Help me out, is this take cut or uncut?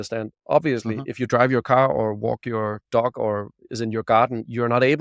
uncut